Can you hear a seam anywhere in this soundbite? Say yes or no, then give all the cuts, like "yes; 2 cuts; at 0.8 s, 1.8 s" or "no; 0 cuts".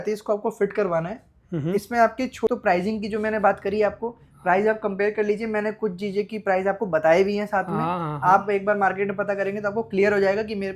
yes; 1 cut; at 2.5 s